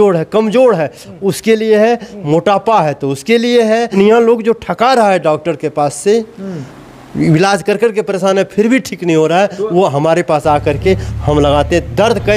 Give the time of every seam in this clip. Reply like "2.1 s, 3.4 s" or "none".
4.0 s